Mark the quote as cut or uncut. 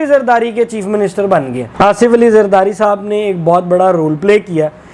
cut